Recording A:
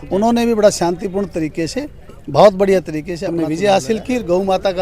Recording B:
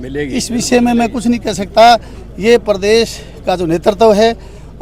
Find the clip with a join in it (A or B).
A